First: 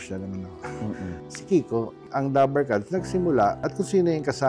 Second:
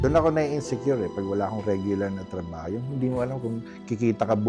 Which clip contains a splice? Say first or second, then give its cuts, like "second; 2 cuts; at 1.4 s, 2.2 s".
first; 2 cuts; at 2.0 s, 3.6 s